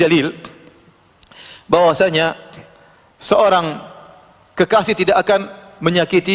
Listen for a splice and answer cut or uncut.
uncut